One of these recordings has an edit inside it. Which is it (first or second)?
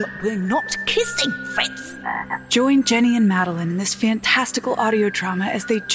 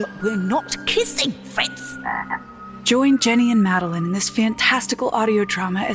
first